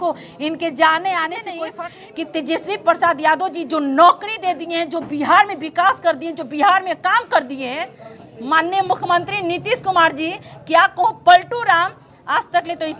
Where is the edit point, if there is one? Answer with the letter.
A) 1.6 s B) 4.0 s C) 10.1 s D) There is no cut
A